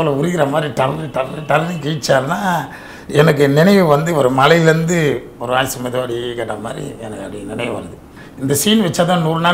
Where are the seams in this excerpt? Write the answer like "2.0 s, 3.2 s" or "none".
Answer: 8.2 s

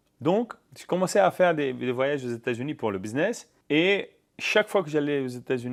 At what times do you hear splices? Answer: none

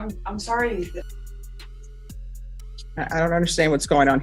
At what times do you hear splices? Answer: 1.1 s, 2.9 s

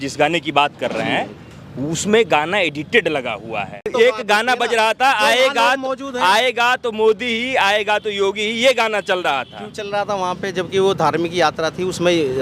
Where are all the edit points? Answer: none

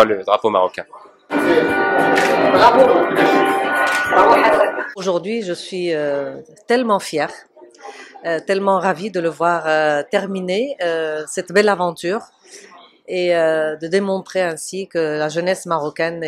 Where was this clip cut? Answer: 5.0 s

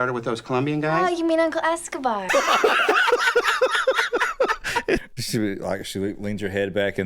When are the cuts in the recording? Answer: 5.0 s

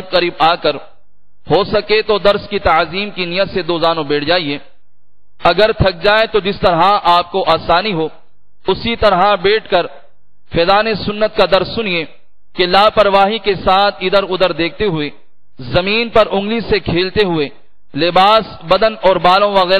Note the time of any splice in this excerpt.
none

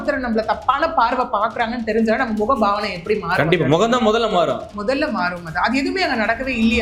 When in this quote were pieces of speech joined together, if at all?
none

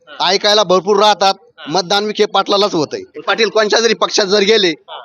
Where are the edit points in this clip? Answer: 3.3 s

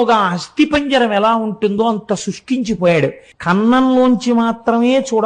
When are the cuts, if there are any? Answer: 3.3 s

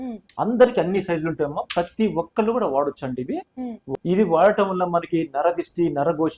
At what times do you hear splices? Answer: 3.8 s

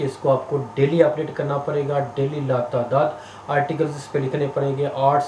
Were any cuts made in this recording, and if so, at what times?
none

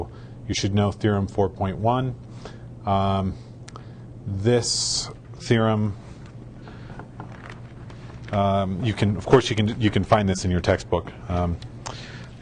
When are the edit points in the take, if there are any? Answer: 1.5 s

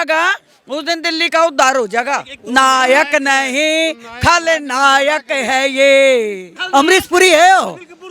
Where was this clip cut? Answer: 2.3 s, 6.5 s

